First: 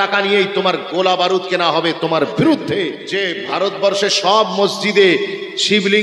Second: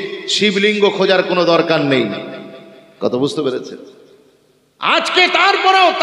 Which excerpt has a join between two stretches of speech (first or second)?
first